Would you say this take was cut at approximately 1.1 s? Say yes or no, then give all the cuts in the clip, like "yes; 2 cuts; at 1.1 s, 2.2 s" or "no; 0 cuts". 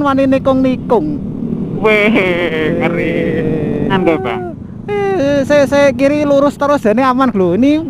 no; 1 cut; at 3.9 s